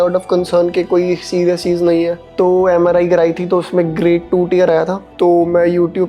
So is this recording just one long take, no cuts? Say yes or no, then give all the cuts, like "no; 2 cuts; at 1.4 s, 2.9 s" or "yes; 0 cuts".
no; 1 cut; at 2.3 s